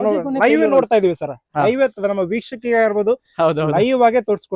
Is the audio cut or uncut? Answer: uncut